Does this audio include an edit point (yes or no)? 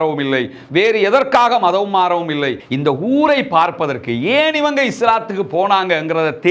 yes